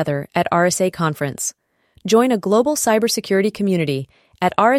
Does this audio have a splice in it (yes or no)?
no